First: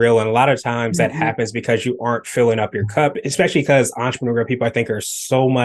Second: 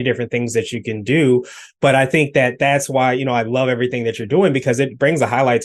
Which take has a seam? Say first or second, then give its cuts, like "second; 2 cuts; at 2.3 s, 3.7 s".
first; 1 cut; at 3.2 s